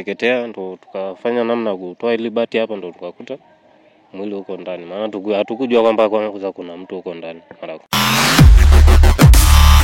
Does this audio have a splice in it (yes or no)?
no